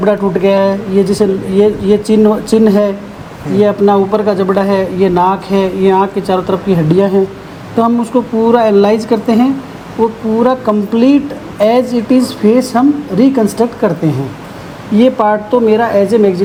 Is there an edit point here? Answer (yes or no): no